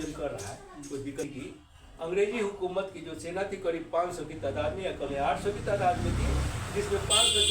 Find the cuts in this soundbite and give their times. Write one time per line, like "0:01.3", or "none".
0:01.4